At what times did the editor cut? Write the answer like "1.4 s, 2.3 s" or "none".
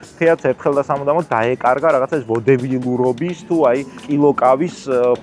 4.0 s